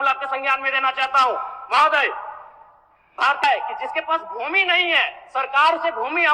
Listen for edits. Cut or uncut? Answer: cut